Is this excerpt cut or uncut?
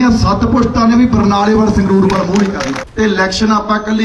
cut